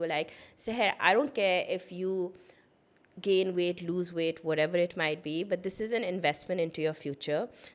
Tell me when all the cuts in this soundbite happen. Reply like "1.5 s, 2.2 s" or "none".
none

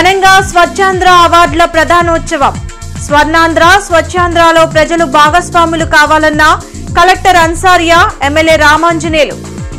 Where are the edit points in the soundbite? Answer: none

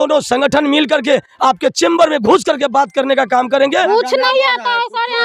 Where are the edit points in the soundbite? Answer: 3.9 s

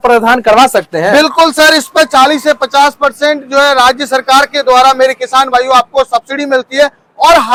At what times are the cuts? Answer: none

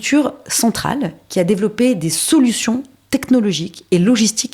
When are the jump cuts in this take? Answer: none

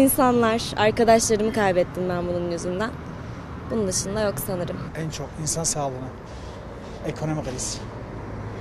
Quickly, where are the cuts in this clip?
none

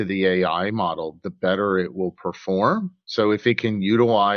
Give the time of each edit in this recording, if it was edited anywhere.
none

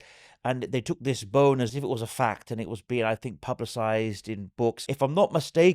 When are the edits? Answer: 1.7 s, 4.7 s

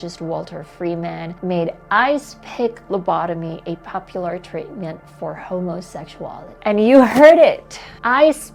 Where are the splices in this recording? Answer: none

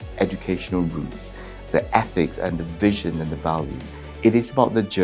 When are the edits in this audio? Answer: none

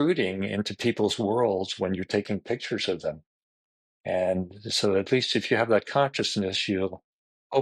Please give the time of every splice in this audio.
none

